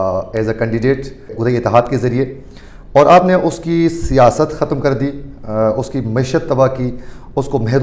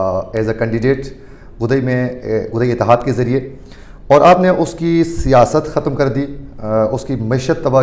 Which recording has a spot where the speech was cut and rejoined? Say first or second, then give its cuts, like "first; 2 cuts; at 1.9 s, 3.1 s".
first; 1 cut; at 1.3 s